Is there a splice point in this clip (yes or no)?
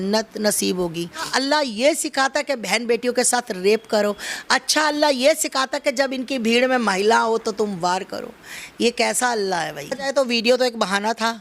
yes